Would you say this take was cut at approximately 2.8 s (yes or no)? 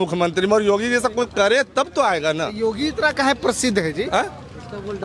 no